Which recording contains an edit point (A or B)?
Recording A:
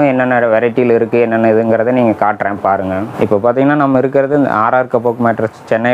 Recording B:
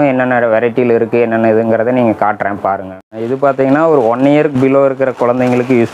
B